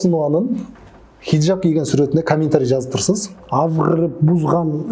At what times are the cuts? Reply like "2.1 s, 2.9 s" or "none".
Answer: 3.4 s